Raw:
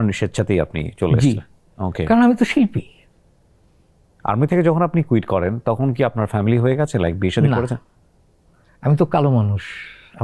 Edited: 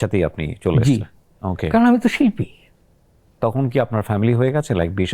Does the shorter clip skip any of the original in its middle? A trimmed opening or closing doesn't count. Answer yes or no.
yes